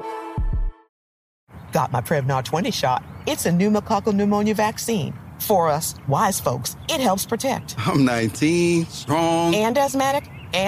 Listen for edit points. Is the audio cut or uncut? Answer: cut